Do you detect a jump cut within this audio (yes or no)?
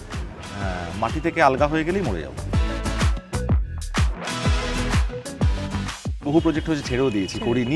no